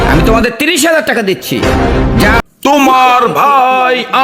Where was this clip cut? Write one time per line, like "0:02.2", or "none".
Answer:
0:02.4

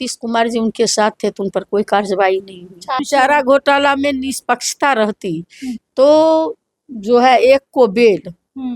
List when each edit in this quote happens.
0:03.0

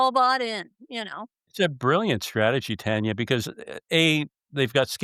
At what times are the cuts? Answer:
none

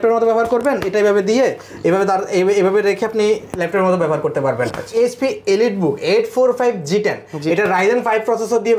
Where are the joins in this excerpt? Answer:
0:04.9

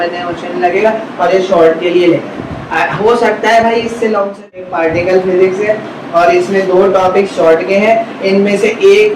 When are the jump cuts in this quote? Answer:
0:04.6

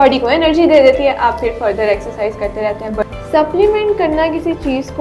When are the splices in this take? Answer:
0:03.0

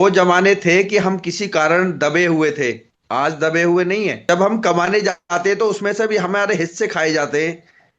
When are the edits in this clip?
0:04.2

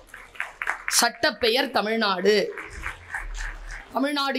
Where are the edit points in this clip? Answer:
none

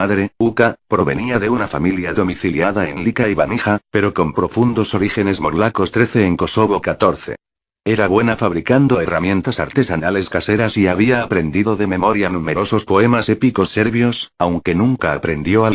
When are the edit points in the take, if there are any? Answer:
0:06.5

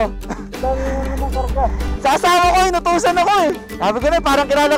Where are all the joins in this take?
0:03.7

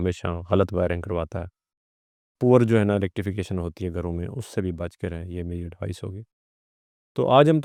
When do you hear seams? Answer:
none

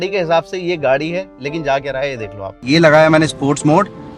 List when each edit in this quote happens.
0:02.5

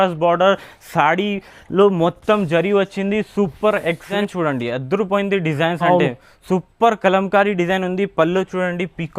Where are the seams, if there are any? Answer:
0:04.1

